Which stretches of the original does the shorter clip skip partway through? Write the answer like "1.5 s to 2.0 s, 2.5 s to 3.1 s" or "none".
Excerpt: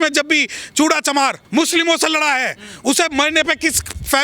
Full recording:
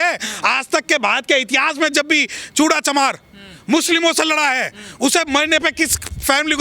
3.2 s to 3.6 s